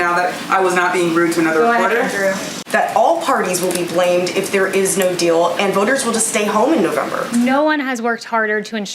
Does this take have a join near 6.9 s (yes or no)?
no